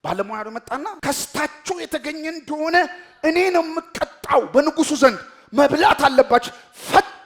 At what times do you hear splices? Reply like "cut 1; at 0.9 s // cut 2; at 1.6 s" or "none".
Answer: cut 1; at 1.0 s